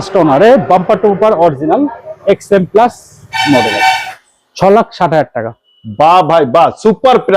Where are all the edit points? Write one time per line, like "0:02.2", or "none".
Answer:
0:04.1